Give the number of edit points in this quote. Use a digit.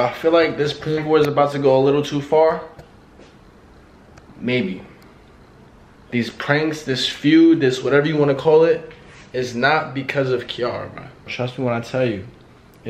2